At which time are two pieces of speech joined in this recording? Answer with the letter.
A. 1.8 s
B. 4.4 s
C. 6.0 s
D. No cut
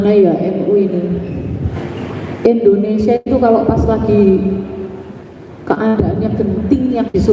A